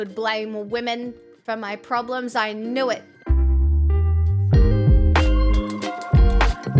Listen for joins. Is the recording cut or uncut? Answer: cut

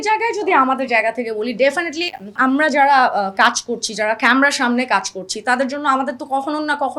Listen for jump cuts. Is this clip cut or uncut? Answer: cut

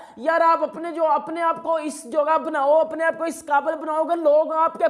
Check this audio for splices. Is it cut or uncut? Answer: uncut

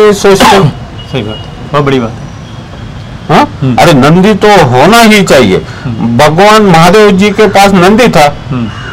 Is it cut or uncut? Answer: uncut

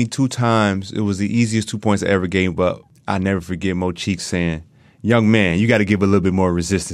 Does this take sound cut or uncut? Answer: cut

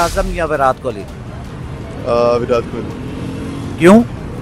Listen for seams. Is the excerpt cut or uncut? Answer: uncut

